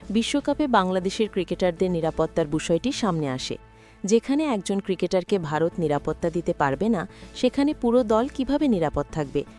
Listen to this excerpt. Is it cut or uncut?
uncut